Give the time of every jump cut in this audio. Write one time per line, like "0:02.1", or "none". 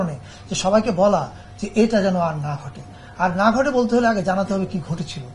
none